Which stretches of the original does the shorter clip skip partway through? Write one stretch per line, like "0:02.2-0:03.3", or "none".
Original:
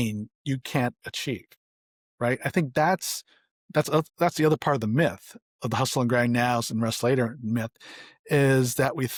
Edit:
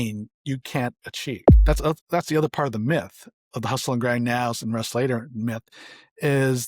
0:01.5-0:03.6